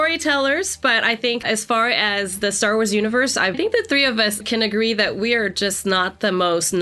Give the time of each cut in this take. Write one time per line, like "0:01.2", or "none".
0:01.4
0:03.5